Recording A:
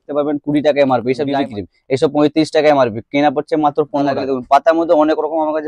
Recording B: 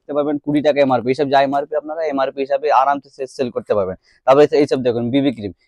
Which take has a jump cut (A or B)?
A